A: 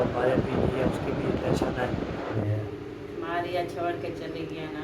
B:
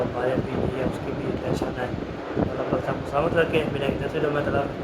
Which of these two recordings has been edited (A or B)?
A